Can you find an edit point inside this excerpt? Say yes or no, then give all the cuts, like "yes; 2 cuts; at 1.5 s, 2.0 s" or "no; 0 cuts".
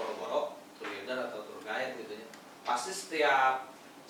no; 0 cuts